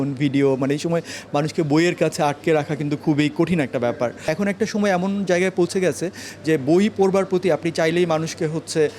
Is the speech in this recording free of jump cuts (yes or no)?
no